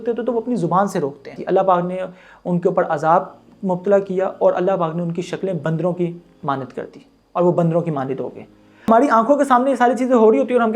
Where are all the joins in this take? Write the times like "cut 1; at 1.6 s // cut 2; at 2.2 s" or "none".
cut 1; at 1.4 s // cut 2; at 8.9 s